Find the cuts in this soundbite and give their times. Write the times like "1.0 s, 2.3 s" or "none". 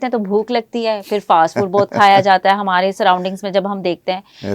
none